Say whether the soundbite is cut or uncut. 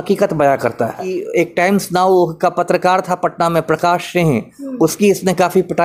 cut